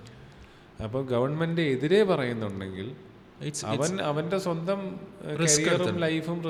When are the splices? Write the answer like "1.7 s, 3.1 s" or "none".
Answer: none